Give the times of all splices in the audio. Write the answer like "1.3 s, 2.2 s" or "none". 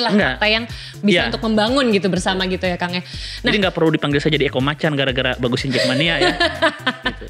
none